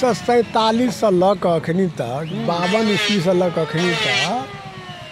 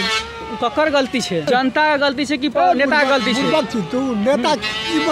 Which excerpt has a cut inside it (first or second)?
second